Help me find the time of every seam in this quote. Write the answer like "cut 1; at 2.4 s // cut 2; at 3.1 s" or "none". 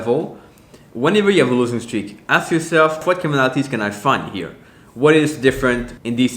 cut 1; at 3.0 s